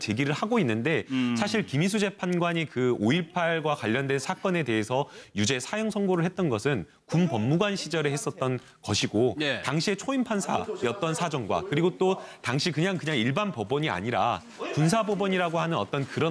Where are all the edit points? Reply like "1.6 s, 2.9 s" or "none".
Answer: none